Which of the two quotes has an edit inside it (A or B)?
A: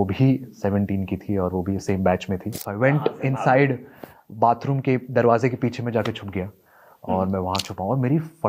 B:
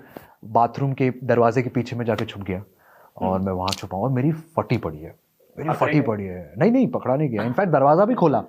A